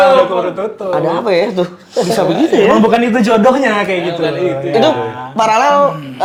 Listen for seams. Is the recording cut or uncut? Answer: uncut